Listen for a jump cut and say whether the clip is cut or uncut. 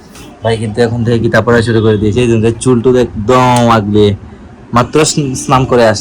uncut